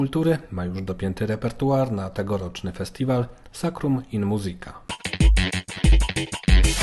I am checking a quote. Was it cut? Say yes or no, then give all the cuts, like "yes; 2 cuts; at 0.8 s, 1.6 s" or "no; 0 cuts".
yes; 1 cut; at 4.8 s